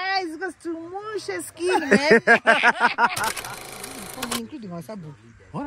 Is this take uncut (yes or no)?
no